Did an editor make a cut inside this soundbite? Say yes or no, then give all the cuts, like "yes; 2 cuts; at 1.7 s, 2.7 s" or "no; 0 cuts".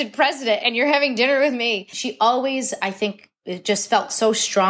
yes; 1 cut; at 2.0 s